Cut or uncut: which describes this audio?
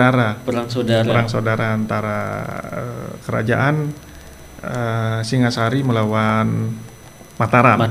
uncut